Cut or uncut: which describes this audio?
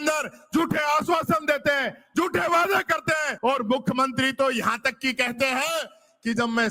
cut